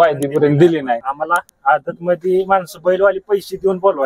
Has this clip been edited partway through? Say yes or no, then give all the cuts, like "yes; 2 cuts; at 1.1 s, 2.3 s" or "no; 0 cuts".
yes; 1 cut; at 1.0 s